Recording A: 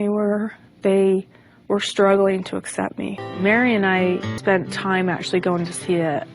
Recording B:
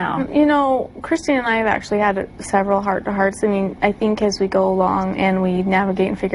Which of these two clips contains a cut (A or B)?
A